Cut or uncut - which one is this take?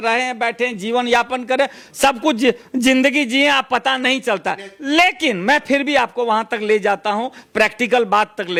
uncut